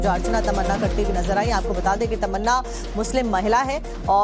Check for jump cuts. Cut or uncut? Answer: cut